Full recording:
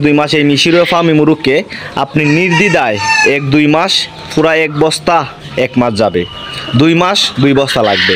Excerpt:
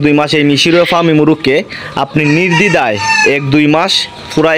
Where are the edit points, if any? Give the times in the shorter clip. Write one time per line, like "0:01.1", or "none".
none